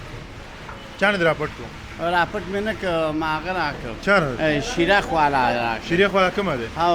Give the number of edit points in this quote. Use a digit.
0